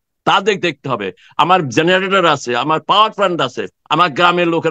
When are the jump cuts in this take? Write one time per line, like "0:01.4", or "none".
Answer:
none